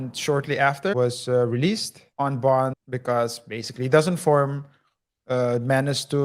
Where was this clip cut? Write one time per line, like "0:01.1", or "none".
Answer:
0:00.9
0:02.0
0:02.9